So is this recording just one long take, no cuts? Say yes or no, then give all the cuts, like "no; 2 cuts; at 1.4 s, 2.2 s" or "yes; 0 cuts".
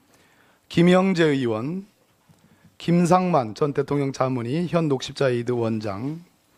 yes; 0 cuts